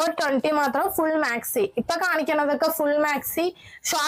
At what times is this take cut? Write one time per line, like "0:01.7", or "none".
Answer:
none